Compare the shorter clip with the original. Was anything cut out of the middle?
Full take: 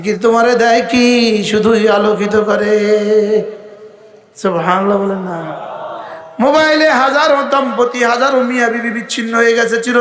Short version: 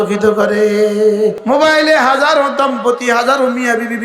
yes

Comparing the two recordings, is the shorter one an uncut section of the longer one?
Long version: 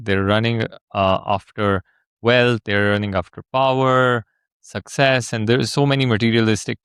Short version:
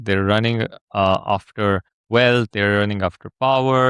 no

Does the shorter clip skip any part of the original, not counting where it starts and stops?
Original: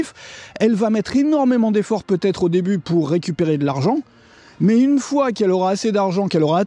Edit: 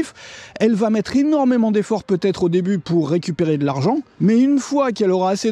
yes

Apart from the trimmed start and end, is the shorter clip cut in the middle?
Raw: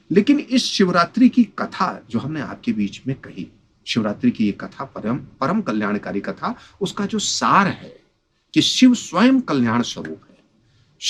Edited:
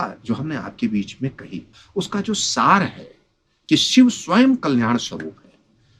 yes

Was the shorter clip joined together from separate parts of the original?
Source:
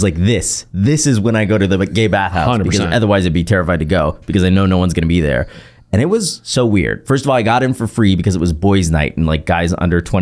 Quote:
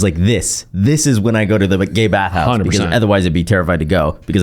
no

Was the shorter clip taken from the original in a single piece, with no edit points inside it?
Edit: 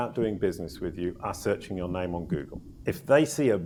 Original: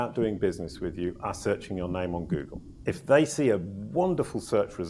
yes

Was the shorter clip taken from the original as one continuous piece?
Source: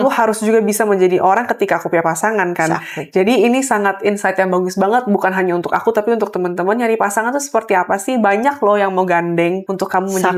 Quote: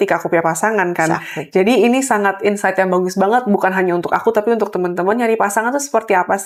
yes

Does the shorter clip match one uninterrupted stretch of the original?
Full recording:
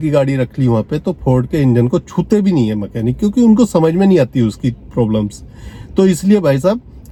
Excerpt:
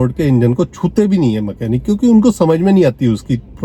yes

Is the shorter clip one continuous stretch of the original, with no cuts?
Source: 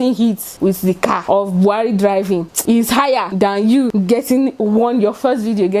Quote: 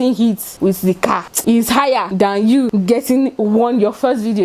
no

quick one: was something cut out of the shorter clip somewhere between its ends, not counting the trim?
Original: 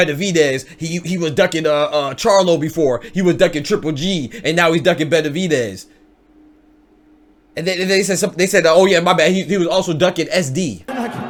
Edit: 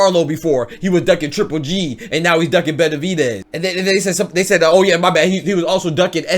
yes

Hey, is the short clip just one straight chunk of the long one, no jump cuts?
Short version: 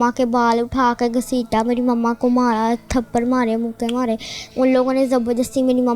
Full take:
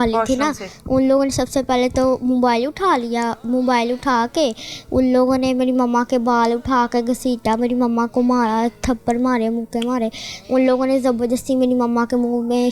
yes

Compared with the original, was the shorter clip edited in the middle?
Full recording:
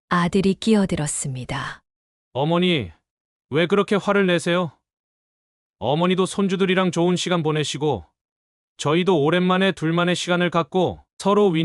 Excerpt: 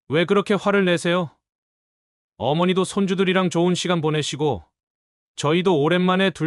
no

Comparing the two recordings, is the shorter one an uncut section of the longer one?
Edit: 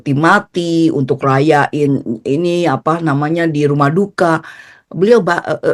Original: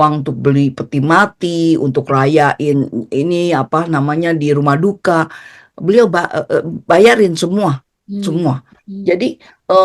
yes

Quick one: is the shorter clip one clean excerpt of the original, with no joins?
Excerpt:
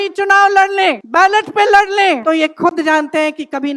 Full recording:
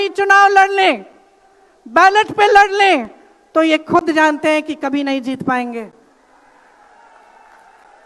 no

